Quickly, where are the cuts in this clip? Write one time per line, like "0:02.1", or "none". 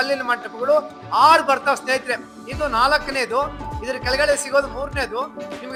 none

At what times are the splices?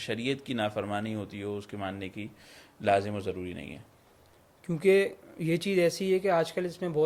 none

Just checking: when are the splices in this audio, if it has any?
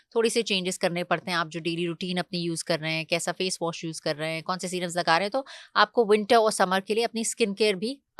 none

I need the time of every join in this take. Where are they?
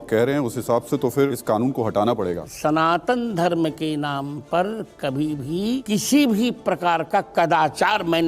0:01.4
0:02.5
0:05.8

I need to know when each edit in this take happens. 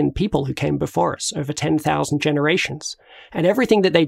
none

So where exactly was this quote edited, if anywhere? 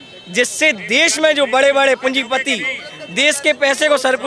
none

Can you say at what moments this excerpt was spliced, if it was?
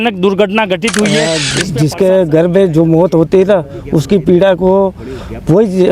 0:01.6

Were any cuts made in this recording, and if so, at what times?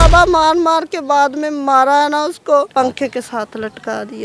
0:02.7

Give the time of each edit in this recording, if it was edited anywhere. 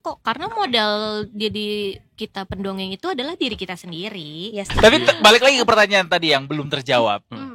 0:04.7

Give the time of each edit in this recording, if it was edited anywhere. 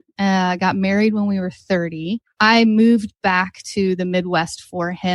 0:02.2

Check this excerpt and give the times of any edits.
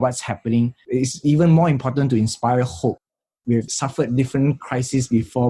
none

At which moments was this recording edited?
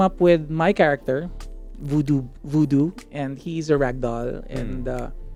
none

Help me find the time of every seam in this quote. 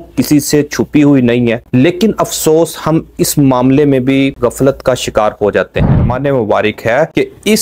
0:06.0

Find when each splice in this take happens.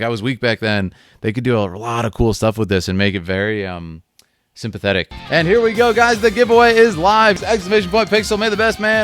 0:05.2
0:07.4

